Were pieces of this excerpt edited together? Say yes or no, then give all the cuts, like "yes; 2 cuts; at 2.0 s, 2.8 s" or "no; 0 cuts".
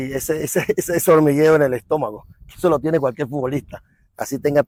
no; 0 cuts